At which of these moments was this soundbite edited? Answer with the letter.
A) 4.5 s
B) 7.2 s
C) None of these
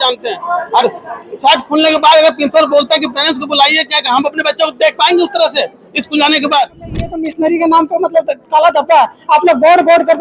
B